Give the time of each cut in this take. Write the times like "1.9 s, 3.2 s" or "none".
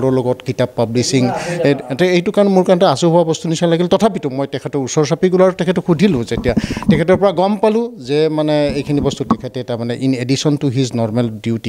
none